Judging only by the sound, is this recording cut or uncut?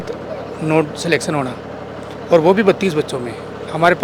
uncut